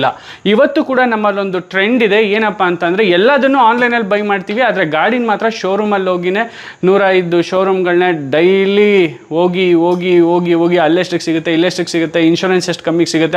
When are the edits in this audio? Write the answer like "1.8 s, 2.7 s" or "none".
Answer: none